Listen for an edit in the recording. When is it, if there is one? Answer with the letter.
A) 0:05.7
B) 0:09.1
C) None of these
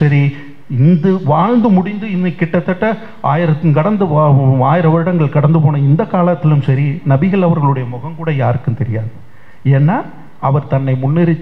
C